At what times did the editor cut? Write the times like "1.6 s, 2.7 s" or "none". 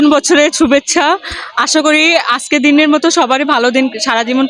none